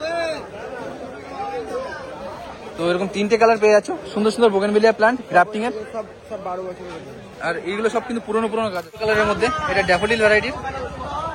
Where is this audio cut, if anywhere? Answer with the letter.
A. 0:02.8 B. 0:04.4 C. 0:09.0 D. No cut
C